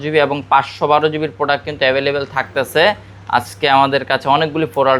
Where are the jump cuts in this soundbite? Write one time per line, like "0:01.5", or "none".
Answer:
none